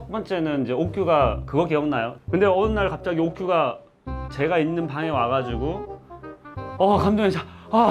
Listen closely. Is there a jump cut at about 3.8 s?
no; 1 cut; at 2.1 s

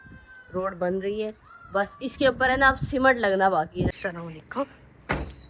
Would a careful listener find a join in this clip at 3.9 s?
yes; 1 cut; at 3.9 s

